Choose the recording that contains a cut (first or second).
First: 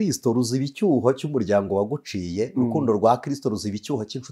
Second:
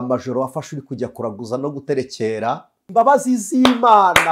second